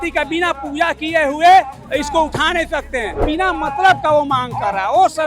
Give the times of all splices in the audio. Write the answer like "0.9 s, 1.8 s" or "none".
3.2 s